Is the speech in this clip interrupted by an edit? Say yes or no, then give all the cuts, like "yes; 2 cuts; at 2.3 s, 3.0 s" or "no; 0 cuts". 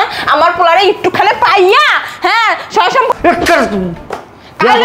yes; 1 cut; at 3.1 s